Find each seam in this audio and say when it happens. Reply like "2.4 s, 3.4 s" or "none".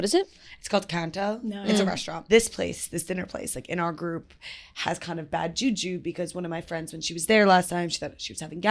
2.2 s